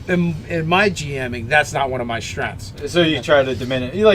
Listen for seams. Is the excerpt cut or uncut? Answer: uncut